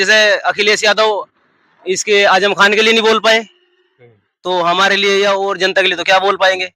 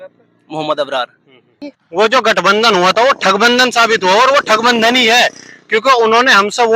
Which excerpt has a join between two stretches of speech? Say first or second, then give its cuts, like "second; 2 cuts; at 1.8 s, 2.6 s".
second; 1 cut; at 1.8 s